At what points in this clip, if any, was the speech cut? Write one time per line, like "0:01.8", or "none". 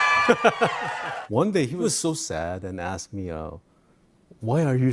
0:01.1
0:01.8

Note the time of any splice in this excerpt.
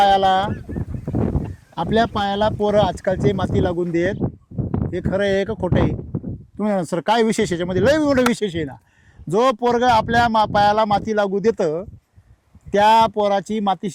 none

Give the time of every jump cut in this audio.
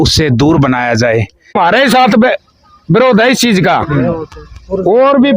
0:01.5

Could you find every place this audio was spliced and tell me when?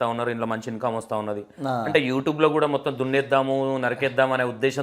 none

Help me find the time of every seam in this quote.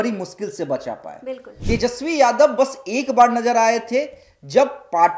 0:01.5

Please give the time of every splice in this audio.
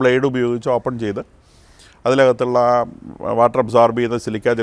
none

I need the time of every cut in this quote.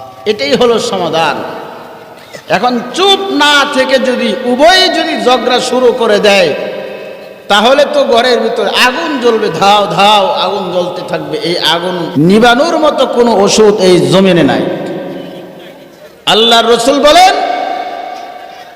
0:12.1

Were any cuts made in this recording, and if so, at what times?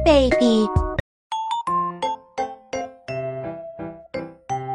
0:01.0
0:03.0
0:03.8

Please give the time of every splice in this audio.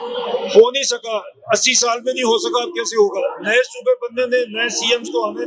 none

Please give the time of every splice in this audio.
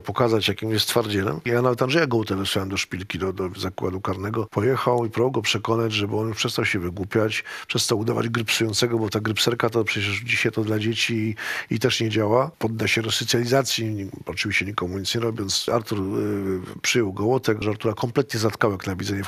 0:01.4
0:04.5
0:12.5
0:15.7
0:17.6

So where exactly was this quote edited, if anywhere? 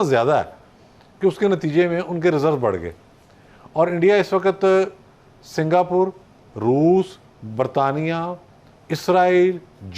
none

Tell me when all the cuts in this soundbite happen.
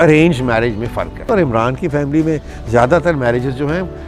0:01.3

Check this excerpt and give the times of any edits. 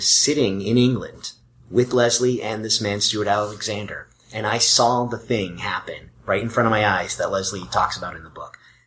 none

